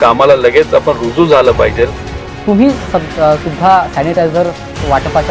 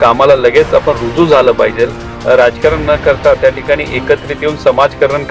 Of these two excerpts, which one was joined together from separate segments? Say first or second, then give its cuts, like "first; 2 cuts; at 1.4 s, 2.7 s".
second; 1 cut; at 2.2 s